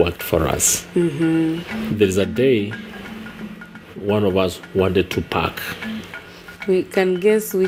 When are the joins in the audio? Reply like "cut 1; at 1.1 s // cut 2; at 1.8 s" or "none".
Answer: none